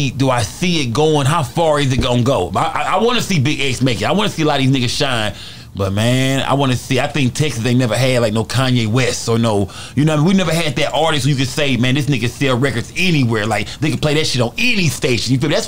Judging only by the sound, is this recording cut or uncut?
uncut